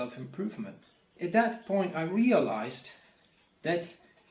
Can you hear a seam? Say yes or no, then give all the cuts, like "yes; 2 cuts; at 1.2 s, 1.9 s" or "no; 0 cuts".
yes; 1 cut; at 1.1 s